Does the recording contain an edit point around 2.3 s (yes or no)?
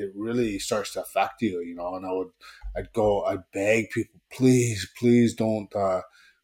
no